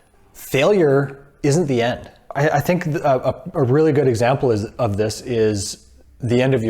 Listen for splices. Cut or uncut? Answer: cut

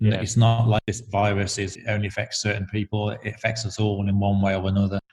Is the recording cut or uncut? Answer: cut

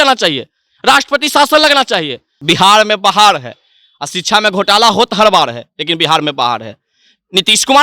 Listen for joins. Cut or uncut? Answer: cut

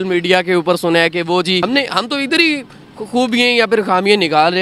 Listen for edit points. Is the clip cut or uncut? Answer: cut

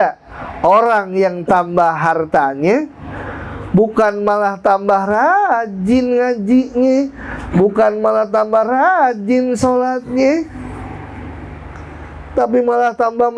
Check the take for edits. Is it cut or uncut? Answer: uncut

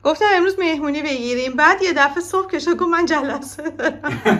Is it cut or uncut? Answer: uncut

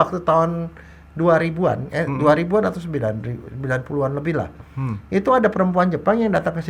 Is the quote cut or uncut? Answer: uncut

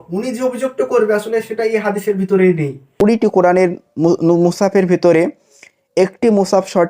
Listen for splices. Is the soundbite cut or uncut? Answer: cut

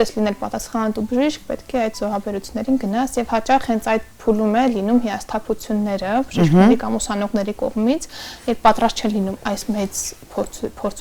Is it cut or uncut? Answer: uncut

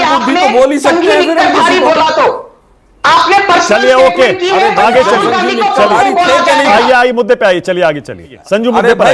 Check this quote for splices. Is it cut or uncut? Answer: uncut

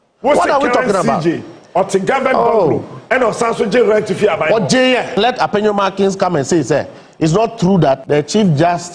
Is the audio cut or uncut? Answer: cut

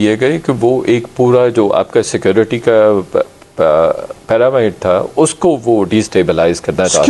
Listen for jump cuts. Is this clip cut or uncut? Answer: uncut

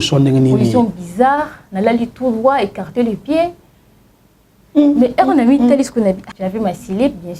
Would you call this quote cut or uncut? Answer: cut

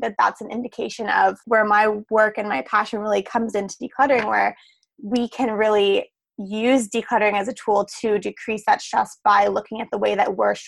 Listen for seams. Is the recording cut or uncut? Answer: cut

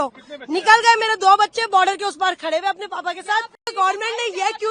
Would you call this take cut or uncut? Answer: cut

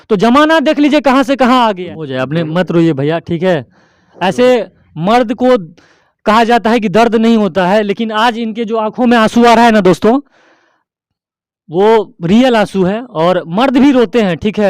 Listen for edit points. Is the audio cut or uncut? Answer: cut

